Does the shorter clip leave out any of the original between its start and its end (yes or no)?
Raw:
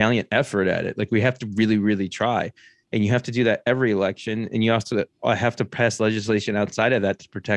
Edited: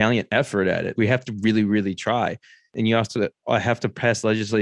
yes